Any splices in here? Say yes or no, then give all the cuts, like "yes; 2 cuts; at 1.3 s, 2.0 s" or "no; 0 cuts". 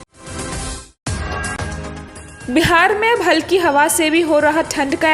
no; 0 cuts